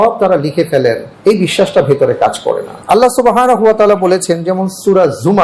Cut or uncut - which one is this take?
cut